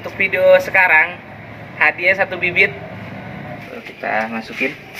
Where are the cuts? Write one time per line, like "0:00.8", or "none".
0:03.7